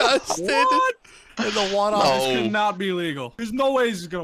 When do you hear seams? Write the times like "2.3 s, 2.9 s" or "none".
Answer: 3.3 s